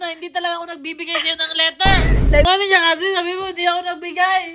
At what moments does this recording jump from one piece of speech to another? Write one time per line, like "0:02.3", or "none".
0:02.4